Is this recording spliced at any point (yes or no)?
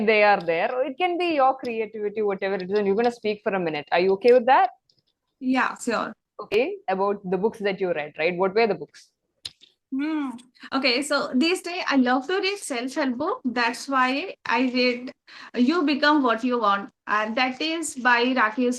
yes